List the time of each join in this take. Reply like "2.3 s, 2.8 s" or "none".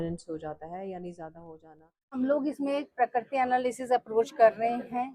2.2 s